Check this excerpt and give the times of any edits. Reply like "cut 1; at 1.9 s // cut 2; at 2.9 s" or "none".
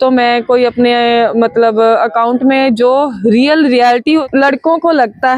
cut 1; at 4.2 s